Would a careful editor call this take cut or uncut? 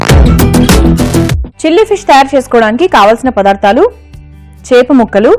cut